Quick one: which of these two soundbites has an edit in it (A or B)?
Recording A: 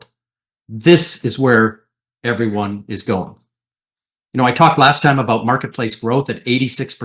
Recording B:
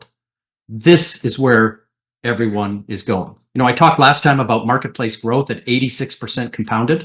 B